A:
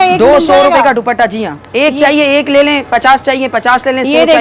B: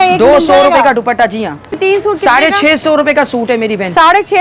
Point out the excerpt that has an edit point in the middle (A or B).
B